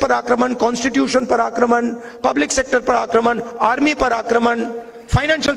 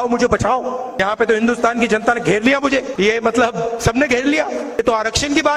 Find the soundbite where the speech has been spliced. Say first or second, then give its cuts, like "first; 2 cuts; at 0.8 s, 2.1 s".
second; 3 cuts; at 1.0 s, 2.9 s, 4.8 s